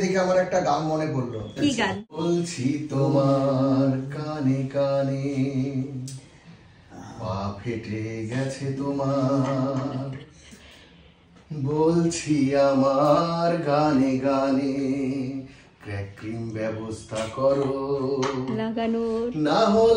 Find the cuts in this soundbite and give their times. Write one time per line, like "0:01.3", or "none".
0:02.2